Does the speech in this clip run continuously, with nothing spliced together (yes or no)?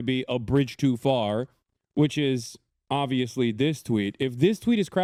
yes